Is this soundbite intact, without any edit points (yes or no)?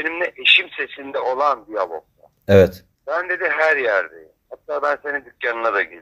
no